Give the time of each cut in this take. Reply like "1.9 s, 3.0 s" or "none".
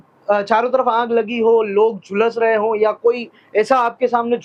none